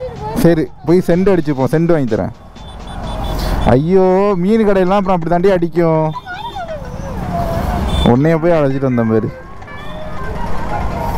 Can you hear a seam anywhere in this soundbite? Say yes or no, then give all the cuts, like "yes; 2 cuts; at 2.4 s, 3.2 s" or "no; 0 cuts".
no; 0 cuts